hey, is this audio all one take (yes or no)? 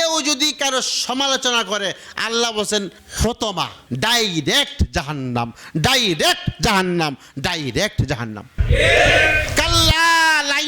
no